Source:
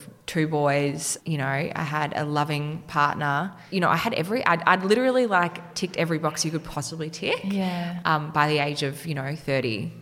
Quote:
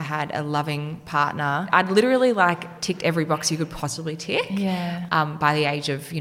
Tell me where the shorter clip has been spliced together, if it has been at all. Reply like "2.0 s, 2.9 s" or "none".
1.7 s